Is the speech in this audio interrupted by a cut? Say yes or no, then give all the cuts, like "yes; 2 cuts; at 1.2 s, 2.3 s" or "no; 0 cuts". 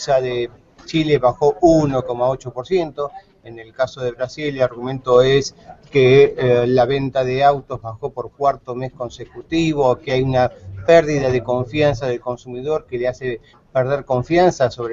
no; 0 cuts